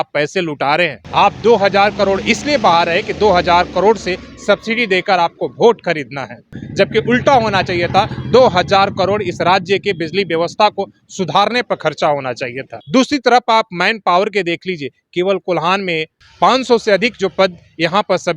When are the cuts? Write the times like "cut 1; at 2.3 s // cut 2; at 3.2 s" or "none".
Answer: cut 1; at 1.0 s // cut 2; at 6.6 s // cut 3; at 12.7 s // cut 4; at 16.2 s